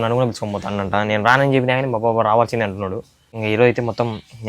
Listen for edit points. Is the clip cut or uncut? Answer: cut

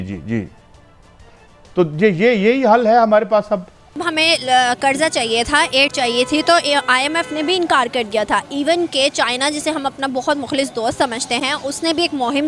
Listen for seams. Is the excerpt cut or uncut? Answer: cut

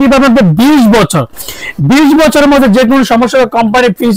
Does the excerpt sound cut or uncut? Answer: uncut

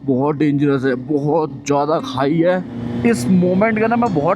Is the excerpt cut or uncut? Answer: cut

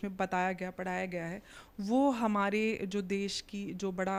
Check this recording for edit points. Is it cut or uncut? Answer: uncut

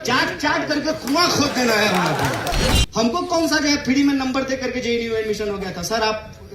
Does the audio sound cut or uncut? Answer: cut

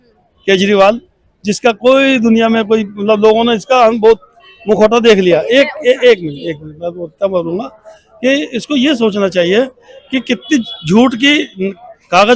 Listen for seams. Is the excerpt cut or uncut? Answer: uncut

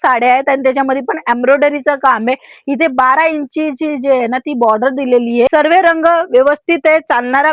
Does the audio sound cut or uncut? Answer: cut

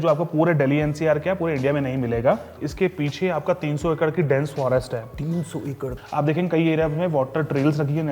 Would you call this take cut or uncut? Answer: cut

